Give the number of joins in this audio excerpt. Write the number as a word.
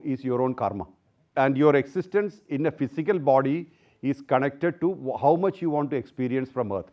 one